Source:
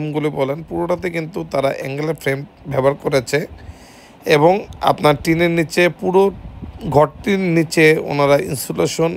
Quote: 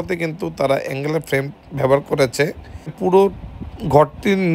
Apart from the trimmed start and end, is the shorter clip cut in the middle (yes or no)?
yes